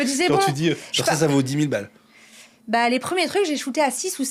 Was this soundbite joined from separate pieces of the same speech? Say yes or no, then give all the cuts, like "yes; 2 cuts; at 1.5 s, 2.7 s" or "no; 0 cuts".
no; 0 cuts